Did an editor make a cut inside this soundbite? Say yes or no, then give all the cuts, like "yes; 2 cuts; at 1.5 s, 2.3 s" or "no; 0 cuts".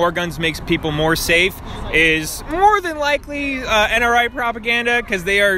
no; 0 cuts